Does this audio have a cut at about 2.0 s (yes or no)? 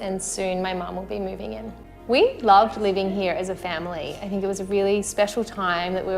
yes